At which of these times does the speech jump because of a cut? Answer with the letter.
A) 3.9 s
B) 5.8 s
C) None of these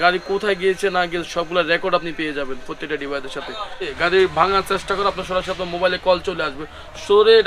A